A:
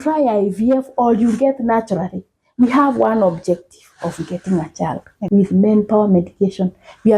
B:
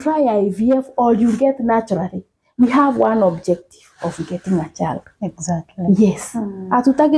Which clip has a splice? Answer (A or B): A